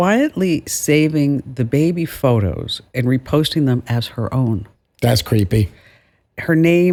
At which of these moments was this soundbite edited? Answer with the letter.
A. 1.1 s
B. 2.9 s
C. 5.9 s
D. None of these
D